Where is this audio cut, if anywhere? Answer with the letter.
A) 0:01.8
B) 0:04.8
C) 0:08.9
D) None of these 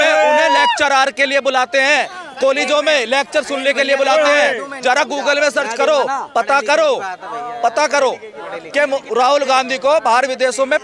D